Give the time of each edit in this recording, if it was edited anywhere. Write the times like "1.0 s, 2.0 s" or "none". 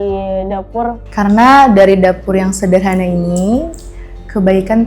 1.0 s

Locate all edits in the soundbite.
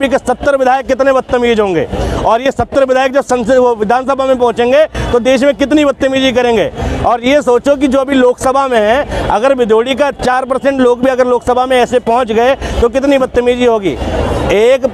none

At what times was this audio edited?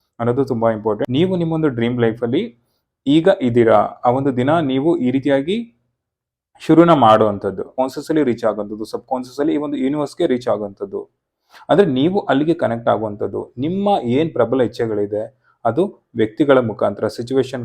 1.0 s, 7.7 s

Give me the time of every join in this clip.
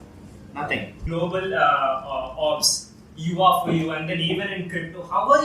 1.0 s

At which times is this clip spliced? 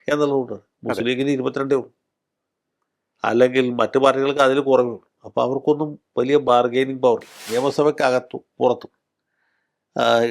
7.4 s

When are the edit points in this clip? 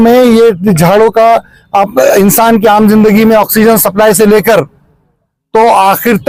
none

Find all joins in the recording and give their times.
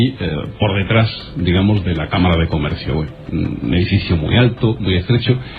none

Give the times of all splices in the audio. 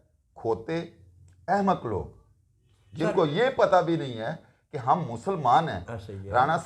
none

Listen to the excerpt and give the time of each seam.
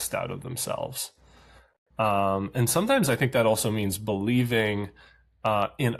none

